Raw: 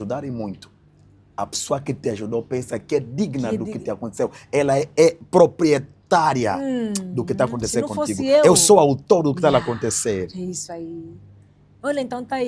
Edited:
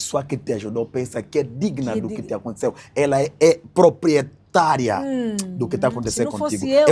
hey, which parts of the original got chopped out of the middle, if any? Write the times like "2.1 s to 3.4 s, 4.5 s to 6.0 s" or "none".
none